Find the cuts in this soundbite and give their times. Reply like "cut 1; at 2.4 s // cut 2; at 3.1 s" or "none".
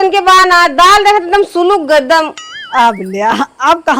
none